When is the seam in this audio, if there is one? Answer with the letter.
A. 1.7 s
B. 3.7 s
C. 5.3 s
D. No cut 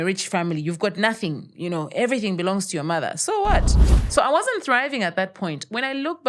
B